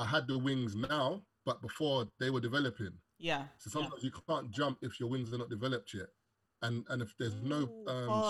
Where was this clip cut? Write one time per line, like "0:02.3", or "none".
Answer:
0:01.3